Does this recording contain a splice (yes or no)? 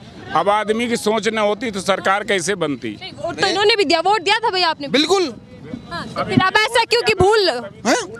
no